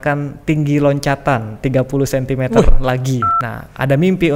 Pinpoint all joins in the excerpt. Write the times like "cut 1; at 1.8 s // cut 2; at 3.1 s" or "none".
cut 1; at 3.4 s